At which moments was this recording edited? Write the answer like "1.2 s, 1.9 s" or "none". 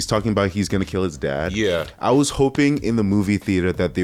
none

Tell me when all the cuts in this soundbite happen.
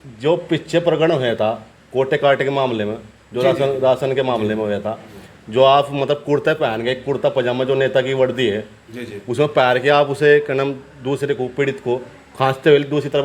none

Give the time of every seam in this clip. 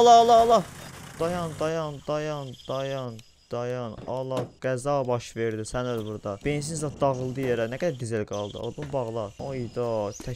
1.0 s, 6.4 s, 9.4 s

